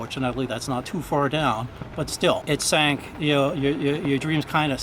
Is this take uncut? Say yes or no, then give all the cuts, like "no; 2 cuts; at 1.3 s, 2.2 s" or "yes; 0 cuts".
no; 1 cut; at 2.4 s